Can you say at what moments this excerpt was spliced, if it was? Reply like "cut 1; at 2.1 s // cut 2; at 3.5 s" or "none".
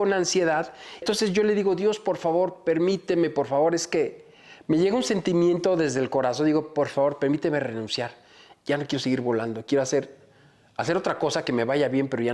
cut 1; at 1.0 s